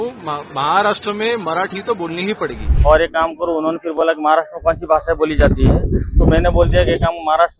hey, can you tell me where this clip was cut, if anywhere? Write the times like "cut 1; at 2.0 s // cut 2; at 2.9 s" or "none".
cut 1; at 2.7 s